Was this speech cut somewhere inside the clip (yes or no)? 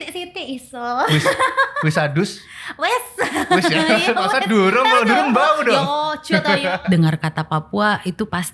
yes